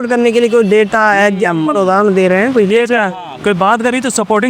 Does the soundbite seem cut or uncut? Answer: uncut